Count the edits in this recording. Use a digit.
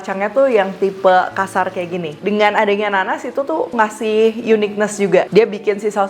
2